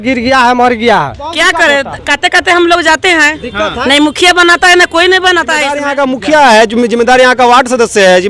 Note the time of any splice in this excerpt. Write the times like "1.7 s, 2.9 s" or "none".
1.3 s, 5.8 s